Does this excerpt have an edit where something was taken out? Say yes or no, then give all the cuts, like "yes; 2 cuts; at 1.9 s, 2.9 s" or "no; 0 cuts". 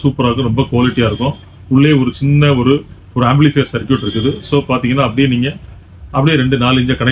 no; 0 cuts